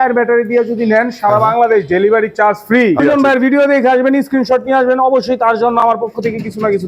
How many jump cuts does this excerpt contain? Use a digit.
1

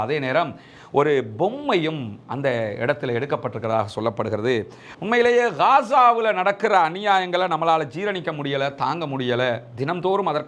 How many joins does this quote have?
1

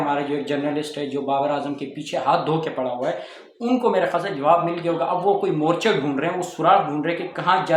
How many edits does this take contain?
0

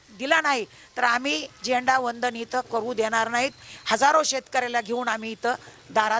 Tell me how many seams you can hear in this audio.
0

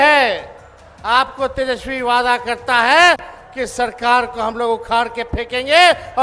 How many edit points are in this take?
0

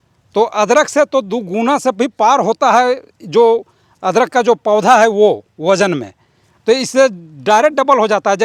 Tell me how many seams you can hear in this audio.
0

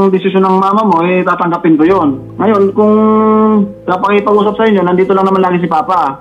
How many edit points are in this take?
2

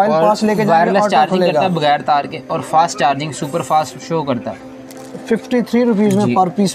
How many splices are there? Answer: 1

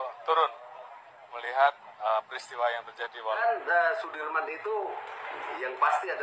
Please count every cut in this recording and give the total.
1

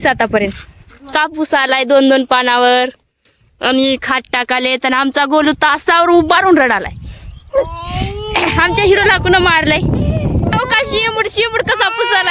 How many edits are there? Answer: 2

